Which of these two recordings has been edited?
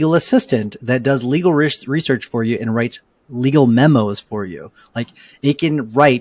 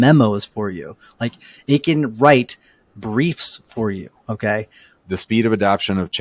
second; 1 cut; at 4.9 s

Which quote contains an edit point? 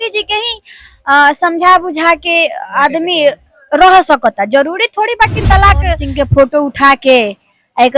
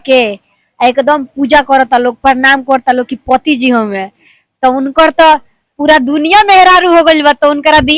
first; 1 cut; at 6.0 s

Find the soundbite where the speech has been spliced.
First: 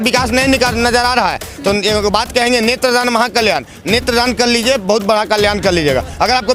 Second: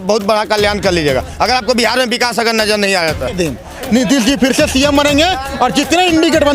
second; 1 cut; at 3.3 s

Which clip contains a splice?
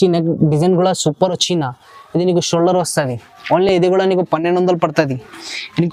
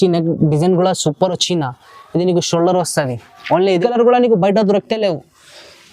second; 1 cut; at 3.8 s

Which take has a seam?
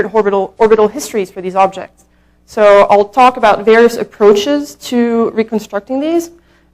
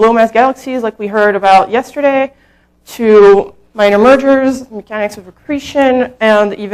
first; 1 cut; at 2.9 s

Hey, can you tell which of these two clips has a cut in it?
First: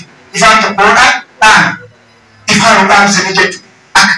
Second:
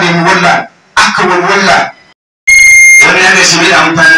second; 1 cut; at 2.0 s

